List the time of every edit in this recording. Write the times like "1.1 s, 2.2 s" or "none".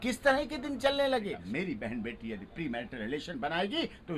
1.4 s